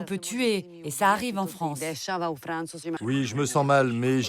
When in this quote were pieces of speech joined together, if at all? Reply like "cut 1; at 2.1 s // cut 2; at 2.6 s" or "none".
cut 1; at 3.0 s